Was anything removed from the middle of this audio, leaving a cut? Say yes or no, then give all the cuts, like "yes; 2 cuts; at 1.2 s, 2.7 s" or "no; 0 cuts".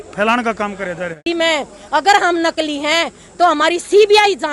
yes; 1 cut; at 1.2 s